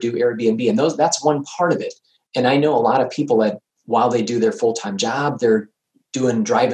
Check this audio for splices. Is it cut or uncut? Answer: cut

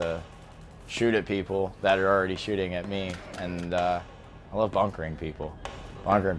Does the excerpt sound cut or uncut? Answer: uncut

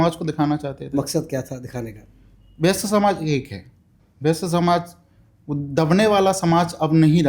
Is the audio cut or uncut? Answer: uncut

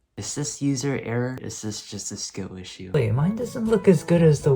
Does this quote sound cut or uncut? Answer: cut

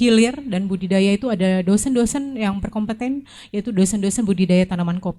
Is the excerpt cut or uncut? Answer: uncut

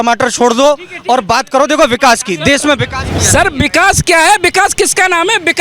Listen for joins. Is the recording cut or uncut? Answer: cut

